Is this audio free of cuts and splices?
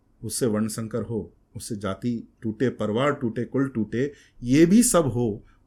yes; 0 cuts

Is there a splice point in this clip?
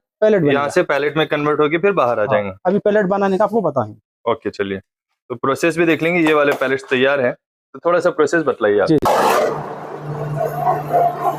no; 0 cuts

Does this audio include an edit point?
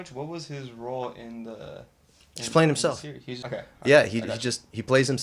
no; 0 cuts

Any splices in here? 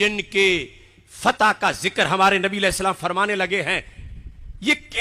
no; 0 cuts

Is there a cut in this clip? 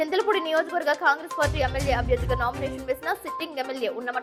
no; 0 cuts

